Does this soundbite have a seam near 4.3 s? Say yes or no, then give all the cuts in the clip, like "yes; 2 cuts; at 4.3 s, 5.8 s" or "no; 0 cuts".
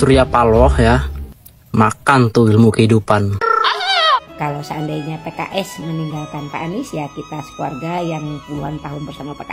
yes; 1 cut; at 4.3 s